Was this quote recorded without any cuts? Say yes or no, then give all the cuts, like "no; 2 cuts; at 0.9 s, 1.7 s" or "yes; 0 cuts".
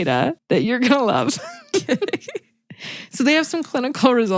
yes; 0 cuts